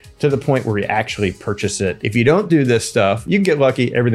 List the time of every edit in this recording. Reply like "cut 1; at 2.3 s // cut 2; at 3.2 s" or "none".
cut 1; at 2.0 s // cut 2; at 3.2 s